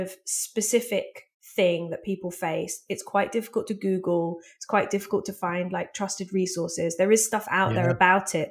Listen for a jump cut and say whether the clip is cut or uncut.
uncut